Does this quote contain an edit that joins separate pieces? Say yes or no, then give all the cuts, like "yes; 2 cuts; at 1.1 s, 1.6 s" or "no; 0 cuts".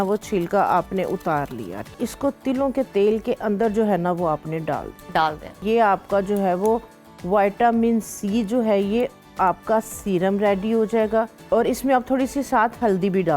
yes; 3 cuts; at 2.0 s, 5.6 s, 11.4 s